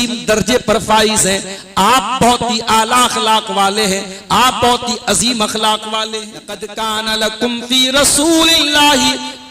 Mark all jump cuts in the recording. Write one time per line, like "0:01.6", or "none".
0:06.6